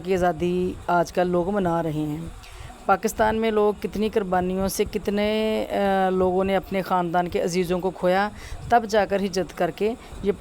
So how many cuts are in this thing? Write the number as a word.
zero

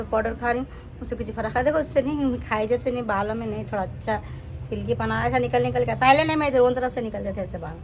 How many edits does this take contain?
zero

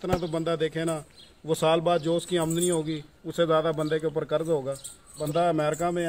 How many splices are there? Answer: one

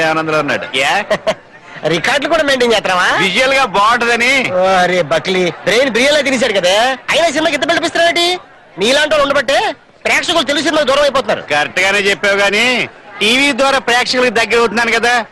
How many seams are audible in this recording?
one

